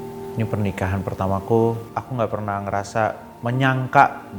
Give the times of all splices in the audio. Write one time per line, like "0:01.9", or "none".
0:01.8
0:03.3